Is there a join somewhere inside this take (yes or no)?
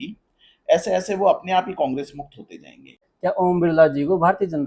yes